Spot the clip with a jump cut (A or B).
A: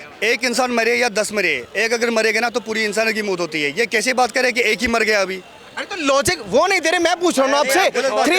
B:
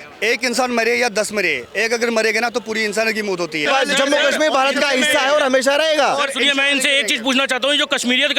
B